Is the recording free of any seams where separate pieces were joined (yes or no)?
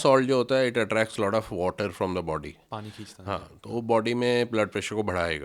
yes